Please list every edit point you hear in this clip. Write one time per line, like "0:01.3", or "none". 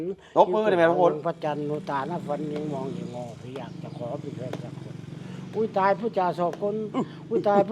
none